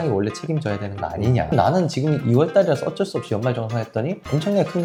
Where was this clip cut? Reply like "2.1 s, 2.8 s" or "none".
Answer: none

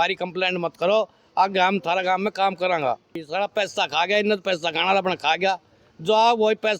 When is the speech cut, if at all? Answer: 3.3 s

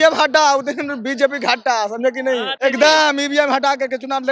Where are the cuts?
2.5 s

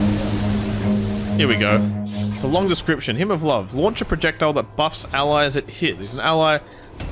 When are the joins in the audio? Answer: 2.4 s, 6.1 s

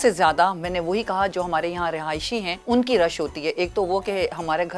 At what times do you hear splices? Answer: 2.5 s

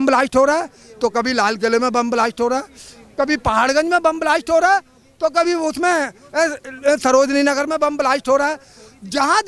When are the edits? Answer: none

